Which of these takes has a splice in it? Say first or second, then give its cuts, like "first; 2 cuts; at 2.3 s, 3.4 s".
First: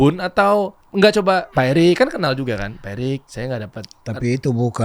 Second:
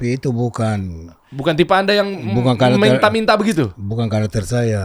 first; 2 cuts; at 1.2 s, 3.3 s